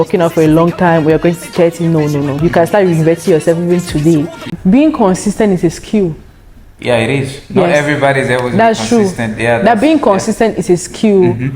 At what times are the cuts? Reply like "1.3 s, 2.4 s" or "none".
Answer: 4.4 s